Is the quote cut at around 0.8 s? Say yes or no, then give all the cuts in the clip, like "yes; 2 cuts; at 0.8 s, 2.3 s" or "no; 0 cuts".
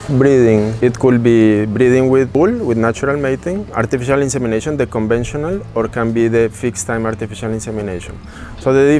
yes; 3 cuts; at 0.8 s, 2.3 s, 3.7 s